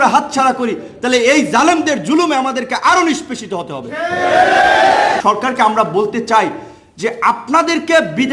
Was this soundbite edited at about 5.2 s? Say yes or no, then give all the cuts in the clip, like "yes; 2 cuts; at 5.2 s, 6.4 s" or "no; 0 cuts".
yes; 1 cut; at 5.2 s